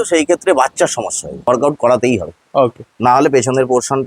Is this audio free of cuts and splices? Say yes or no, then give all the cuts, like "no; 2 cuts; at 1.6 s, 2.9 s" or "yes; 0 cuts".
no; 1 cut; at 1.3 s